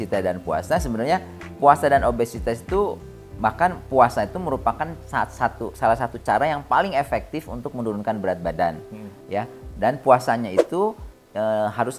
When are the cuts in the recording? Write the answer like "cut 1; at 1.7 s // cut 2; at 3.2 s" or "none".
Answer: none

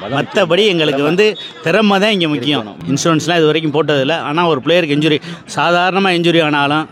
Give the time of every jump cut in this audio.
cut 1; at 2.7 s

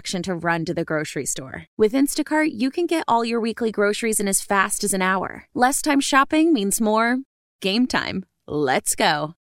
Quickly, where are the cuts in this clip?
none

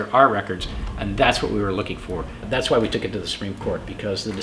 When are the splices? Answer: cut 1; at 2.4 s

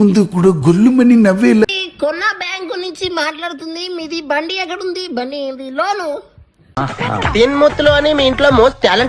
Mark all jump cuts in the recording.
cut 1; at 1.8 s

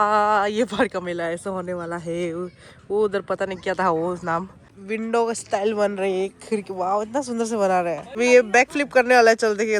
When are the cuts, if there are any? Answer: cut 1; at 4.7 s // cut 2; at 8.0 s

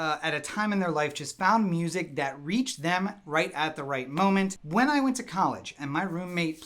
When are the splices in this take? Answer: cut 1; at 4.6 s

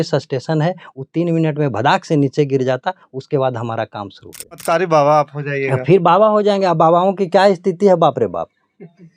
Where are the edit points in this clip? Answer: cut 1; at 4.6 s

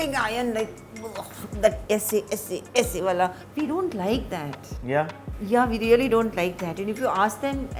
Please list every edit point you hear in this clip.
cut 1; at 1.8 s // cut 2; at 3.4 s

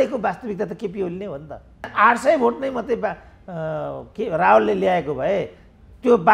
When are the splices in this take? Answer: cut 1; at 1.9 s

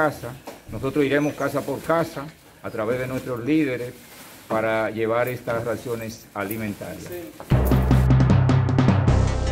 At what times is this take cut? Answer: cut 1; at 7.4 s

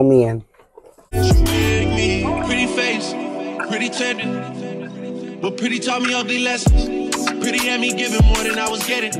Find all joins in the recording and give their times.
cut 1; at 1.4 s

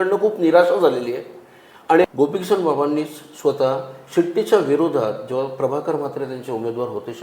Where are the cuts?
cut 1; at 2.0 s

